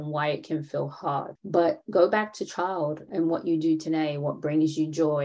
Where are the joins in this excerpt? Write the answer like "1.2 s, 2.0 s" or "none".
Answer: 1.4 s, 3.1 s